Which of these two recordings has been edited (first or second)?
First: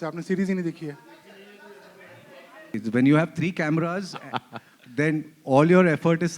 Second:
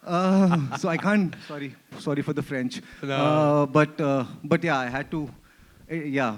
first